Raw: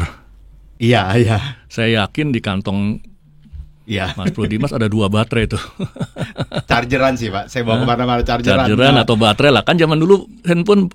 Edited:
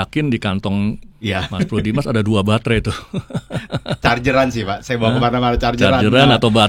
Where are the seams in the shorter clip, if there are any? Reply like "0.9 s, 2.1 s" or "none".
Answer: 1.1 s